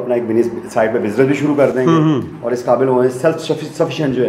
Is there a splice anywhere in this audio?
no; 0 cuts

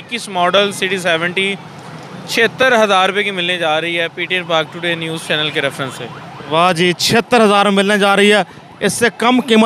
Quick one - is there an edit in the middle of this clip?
no; 0 cuts

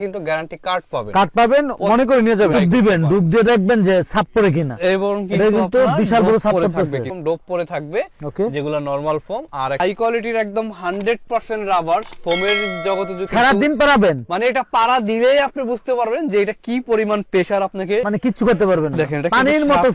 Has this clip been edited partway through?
yes; 4 cuts; at 2.5 s, 7.1 s, 9.8 s, 13.3 s

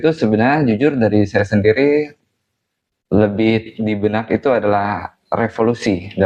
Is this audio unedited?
yes; 0 cuts

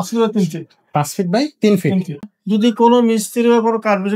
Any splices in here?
yes; 1 cut; at 2.3 s

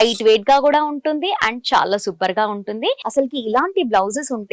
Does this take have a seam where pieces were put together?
yes; 1 cut; at 3.0 s

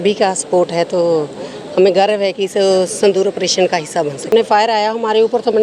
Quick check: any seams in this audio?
yes; 1 cut; at 4.3 s

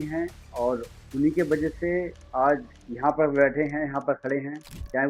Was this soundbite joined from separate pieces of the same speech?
yes; 1 cut; at 2.8 s

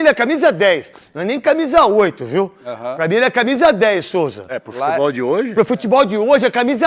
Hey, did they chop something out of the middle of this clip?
no; 0 cuts

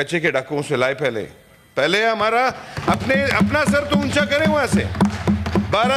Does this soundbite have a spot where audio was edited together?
no; 0 cuts

